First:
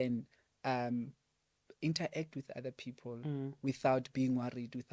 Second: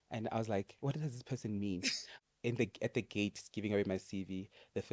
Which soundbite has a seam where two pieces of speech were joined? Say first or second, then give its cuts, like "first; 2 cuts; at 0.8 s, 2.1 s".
second; 1 cut; at 2.1 s